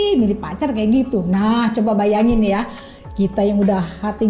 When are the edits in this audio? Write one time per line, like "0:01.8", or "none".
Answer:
none